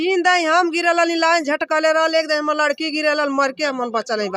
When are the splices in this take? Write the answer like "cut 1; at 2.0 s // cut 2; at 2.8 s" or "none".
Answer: none